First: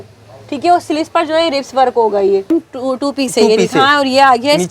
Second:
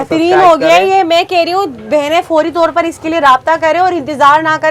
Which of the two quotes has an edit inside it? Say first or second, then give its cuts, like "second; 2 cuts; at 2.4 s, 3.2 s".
first; 1 cut; at 2.5 s